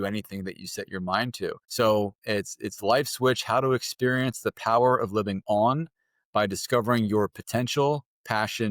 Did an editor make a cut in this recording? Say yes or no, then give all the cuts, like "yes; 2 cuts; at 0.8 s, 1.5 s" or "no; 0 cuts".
yes; 1 cut; at 1.6 s